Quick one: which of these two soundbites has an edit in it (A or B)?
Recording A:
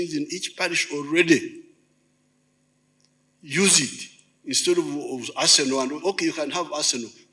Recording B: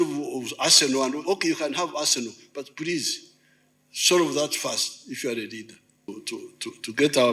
B